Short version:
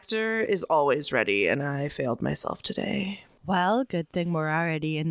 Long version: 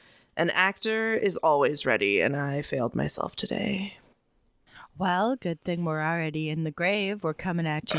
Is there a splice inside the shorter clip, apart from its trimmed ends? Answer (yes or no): yes